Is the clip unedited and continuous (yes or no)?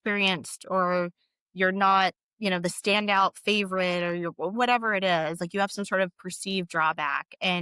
yes